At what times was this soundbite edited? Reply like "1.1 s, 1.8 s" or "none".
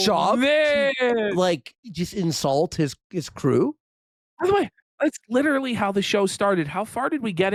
none